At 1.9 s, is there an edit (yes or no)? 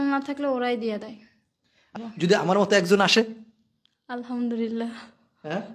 yes